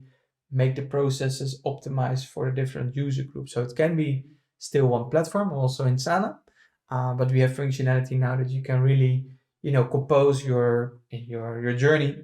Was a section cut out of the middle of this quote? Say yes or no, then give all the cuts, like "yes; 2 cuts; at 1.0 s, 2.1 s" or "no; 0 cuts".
no; 0 cuts